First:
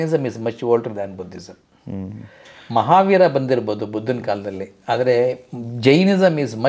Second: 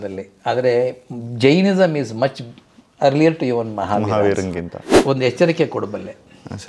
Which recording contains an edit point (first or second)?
second